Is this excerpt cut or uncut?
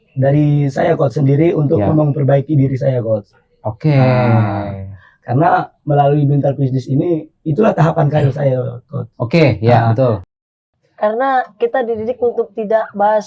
cut